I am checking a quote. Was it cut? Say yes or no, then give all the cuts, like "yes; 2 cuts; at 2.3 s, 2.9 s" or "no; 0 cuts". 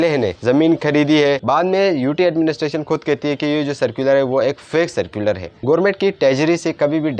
yes; 2 cuts; at 1.4 s, 5.6 s